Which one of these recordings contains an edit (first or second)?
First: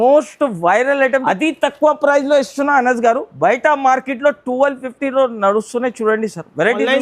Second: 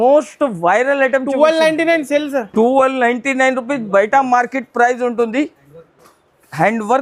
first